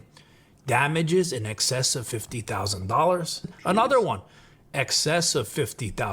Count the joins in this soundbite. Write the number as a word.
one